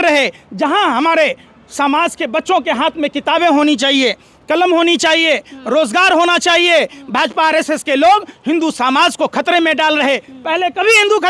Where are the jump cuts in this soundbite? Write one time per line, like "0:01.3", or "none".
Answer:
none